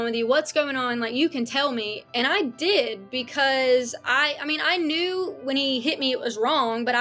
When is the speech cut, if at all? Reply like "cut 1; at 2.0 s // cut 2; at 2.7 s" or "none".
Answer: none